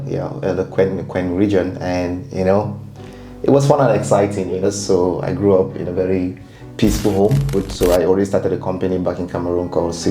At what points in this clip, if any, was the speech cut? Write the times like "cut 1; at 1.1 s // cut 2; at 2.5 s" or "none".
cut 1; at 4.6 s // cut 2; at 7.6 s